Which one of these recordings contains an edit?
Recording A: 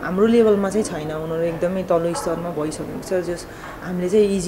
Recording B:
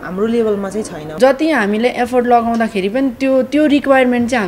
B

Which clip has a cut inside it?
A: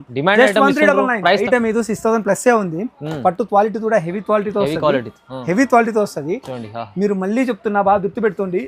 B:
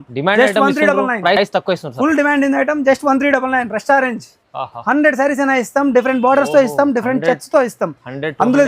A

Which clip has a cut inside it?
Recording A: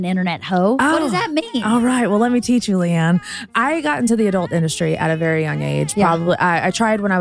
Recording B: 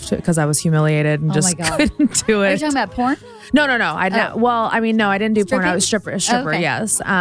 A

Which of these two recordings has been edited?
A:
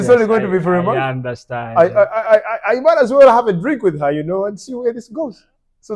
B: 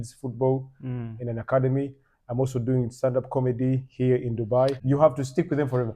B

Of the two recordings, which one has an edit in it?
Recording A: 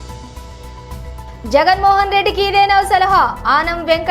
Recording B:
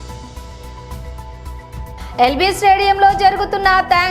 A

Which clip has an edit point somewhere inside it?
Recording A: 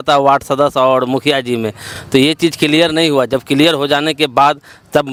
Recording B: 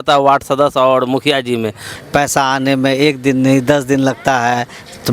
B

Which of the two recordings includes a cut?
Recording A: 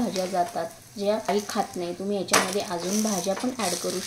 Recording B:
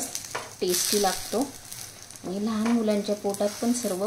A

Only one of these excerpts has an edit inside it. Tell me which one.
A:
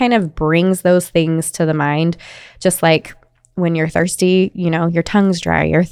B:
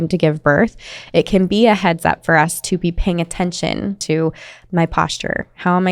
B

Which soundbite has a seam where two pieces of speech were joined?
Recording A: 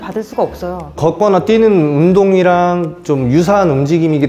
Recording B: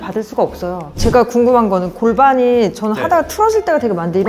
A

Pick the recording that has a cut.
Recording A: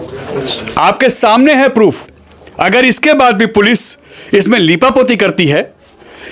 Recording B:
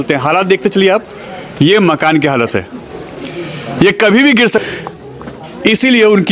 B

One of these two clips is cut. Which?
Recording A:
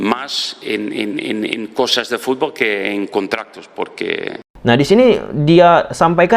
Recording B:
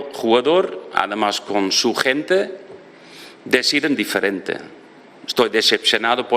A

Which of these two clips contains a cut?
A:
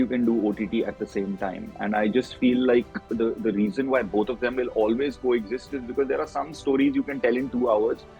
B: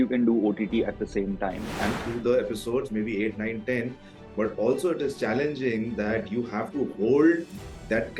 B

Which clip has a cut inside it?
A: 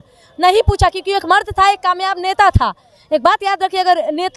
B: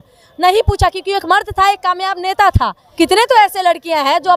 B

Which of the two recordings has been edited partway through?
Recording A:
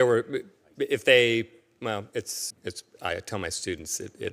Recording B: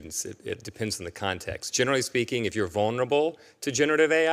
A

